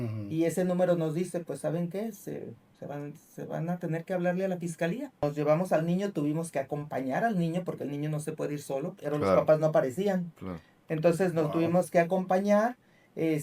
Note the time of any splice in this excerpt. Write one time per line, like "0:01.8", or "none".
0:05.2